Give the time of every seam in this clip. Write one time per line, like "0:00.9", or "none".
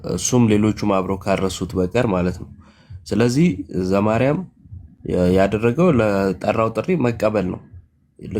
none